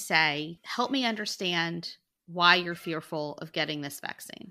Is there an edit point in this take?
no; 0 cuts

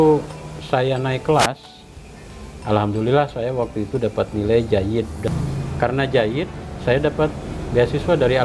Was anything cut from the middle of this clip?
yes; 1 cut; at 5.3 s

